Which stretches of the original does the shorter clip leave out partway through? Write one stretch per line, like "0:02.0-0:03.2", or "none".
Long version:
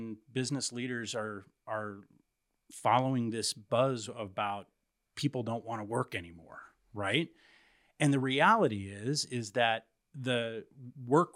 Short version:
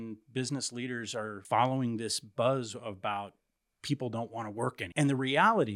0:01.4-0:02.7
0:06.2-0:07.9